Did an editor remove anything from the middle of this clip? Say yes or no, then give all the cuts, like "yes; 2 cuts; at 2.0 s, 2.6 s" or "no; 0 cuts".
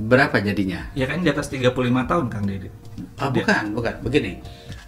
no; 0 cuts